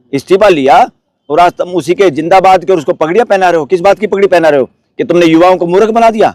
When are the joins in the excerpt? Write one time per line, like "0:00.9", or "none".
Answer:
none